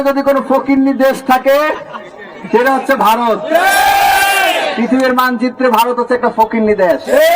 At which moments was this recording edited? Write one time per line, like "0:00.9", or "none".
0:04.7

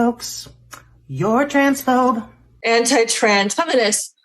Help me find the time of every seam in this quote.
0:02.7

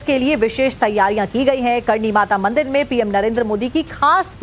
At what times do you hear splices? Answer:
0:03.2

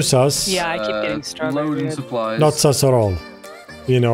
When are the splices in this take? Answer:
none

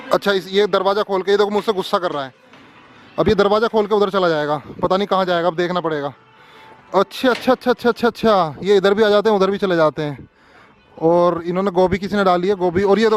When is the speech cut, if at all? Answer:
none

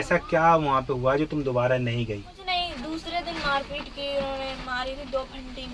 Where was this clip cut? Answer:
0:02.4

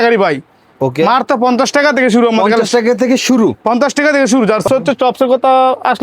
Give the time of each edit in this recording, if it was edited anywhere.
0:04.6

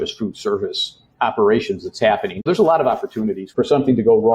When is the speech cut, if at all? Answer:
0:02.3
0:03.4

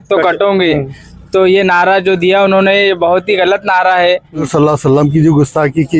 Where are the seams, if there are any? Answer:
0:04.5

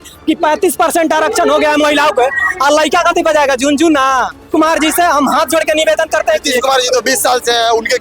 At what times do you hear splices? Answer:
0:04.5

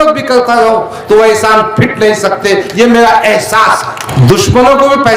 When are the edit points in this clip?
0:04.1

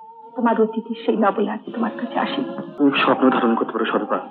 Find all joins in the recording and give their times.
0:02.7

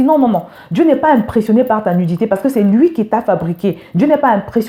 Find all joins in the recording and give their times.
none

